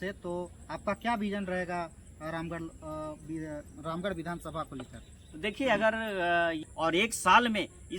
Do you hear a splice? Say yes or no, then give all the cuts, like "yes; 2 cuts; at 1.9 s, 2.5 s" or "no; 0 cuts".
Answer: yes; 1 cut; at 6.7 s